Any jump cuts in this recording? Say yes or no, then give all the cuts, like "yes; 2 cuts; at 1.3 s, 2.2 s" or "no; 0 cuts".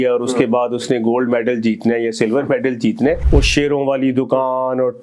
yes; 1 cut; at 3.2 s